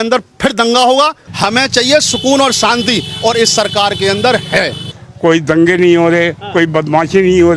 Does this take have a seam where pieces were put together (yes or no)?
yes